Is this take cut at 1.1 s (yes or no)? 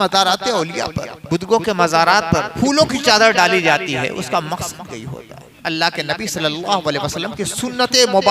yes